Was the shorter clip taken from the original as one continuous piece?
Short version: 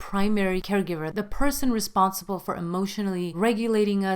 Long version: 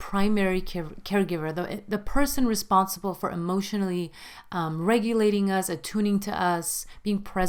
no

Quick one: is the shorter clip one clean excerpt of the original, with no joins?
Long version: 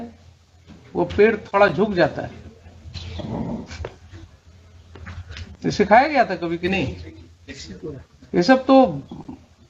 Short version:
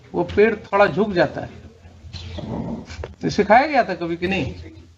no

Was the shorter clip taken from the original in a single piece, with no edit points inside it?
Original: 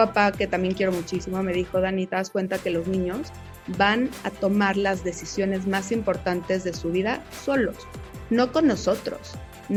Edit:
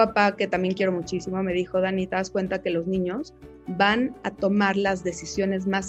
yes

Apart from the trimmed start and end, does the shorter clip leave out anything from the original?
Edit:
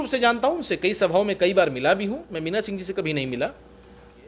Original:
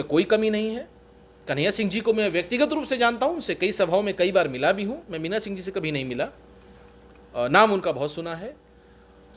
no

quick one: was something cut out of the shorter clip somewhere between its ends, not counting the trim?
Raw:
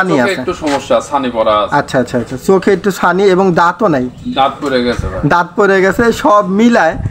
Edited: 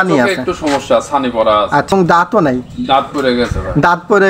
yes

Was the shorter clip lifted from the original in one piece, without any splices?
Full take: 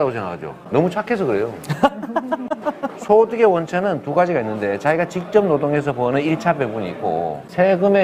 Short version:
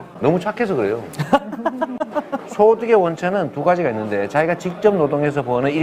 yes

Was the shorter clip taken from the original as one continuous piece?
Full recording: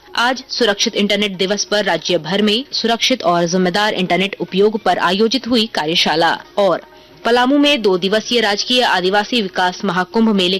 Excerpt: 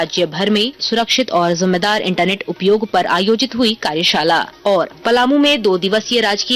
no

